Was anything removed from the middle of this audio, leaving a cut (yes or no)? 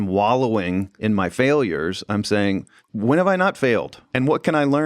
yes